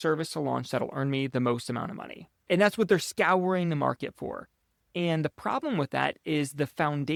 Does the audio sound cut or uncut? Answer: uncut